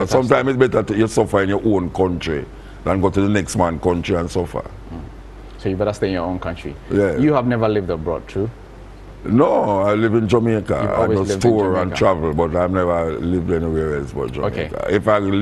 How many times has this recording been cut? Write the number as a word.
zero